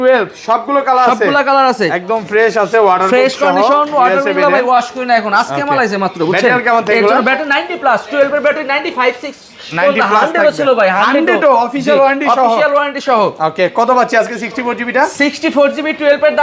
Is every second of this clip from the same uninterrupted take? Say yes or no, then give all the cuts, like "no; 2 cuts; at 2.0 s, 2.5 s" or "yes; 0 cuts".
yes; 0 cuts